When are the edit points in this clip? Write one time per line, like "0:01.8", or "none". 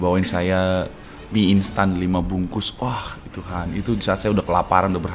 none